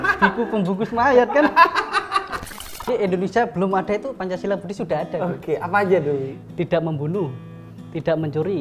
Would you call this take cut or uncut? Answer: cut